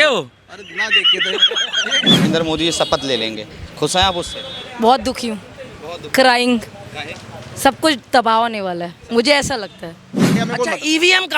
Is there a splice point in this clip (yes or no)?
yes